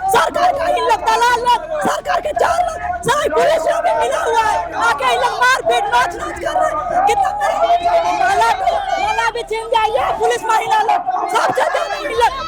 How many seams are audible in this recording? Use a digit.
0